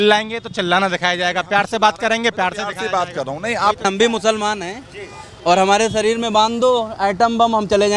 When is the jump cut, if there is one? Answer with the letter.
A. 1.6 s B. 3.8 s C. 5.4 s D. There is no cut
B